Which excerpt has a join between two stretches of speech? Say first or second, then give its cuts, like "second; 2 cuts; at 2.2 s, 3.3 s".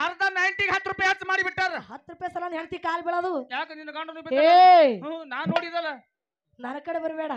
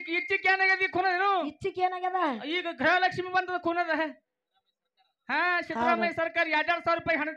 first; 1 cut; at 2.0 s